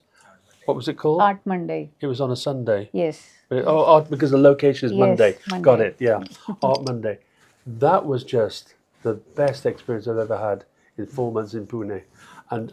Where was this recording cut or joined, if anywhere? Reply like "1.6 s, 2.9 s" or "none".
none